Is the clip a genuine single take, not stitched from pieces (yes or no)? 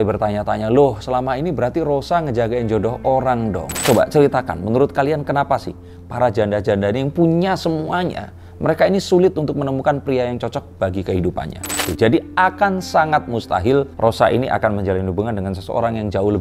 no